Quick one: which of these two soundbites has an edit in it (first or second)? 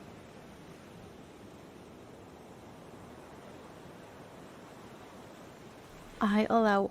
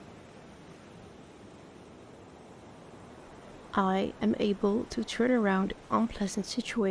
second